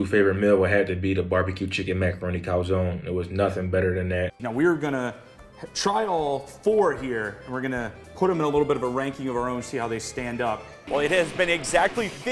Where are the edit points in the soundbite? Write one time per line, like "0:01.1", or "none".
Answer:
0:04.4
0:10.8